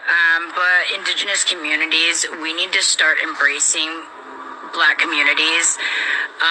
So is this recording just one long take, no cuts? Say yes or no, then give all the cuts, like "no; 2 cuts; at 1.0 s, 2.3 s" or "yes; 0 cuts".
no; 1 cut; at 3.7 s